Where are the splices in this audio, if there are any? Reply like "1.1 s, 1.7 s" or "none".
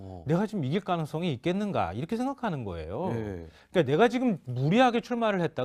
2.7 s